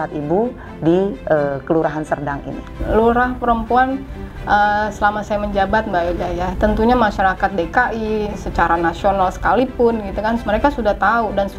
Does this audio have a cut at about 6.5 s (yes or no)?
yes